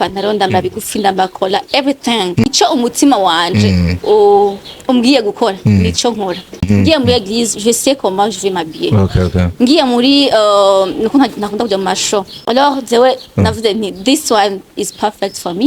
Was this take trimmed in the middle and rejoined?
yes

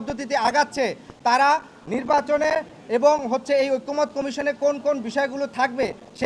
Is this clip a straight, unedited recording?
yes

